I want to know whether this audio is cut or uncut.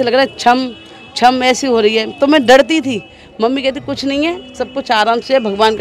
uncut